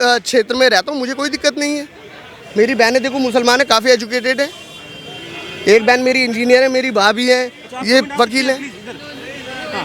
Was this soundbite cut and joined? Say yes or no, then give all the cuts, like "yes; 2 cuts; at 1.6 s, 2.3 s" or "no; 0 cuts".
no; 0 cuts